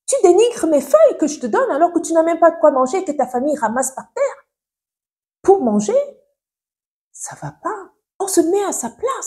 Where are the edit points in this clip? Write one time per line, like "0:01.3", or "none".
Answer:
0:08.2